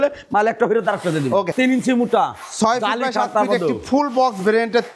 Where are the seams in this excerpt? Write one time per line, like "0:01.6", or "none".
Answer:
0:01.5